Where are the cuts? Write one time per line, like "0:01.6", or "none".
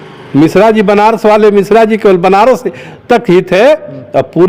none